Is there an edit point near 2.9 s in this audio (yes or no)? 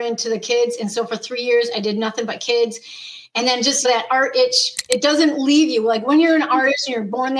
no